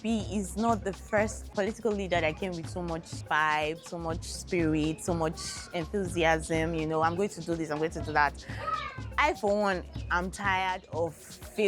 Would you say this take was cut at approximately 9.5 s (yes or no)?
no